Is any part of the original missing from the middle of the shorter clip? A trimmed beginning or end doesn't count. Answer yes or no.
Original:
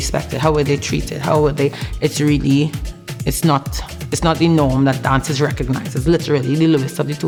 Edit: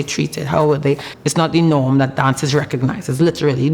yes